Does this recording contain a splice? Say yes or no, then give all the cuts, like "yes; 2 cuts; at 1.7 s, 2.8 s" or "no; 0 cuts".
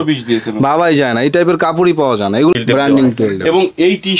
yes; 1 cut; at 2.5 s